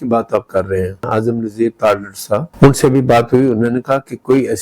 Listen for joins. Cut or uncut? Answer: cut